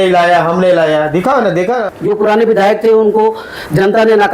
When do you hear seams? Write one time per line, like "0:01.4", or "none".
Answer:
0:01.9